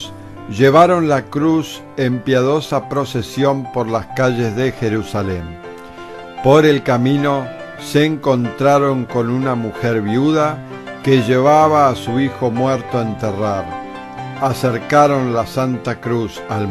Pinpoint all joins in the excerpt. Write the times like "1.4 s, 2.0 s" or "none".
none